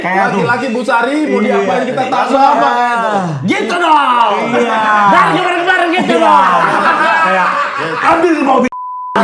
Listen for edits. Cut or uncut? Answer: uncut